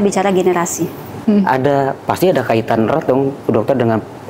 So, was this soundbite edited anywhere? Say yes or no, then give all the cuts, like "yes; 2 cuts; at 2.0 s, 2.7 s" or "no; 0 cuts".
yes; 1 cut; at 1.2 s